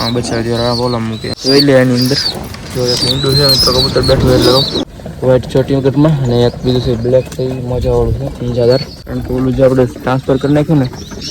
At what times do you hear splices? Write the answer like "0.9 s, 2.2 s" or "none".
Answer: 1.3 s, 4.9 s, 8.9 s